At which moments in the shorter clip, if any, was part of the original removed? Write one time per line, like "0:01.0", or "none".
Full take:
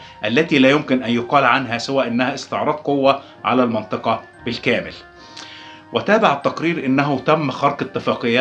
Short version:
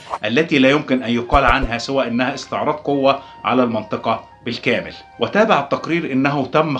0:05.0